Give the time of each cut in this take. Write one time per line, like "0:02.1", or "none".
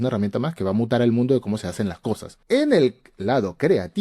0:02.3